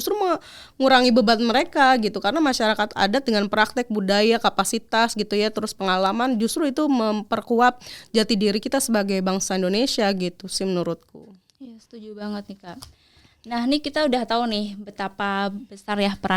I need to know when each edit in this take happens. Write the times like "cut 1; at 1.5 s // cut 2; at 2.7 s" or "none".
none